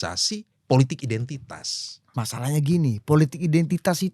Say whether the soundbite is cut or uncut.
cut